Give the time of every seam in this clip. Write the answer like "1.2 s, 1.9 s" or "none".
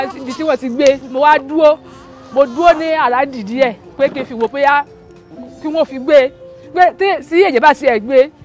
1.0 s